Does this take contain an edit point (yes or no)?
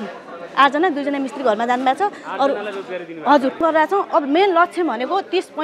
yes